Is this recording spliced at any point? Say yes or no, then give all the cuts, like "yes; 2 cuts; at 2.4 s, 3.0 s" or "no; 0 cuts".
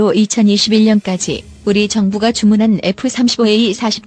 no; 0 cuts